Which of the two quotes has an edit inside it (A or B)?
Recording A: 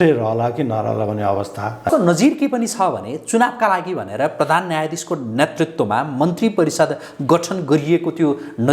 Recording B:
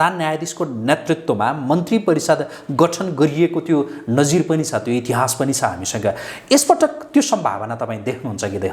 A